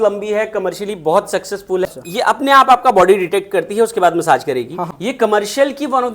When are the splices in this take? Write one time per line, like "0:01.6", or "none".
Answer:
0:01.9
0:04.9